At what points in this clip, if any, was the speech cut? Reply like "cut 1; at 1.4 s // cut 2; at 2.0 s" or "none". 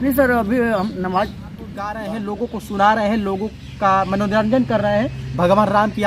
cut 1; at 2.0 s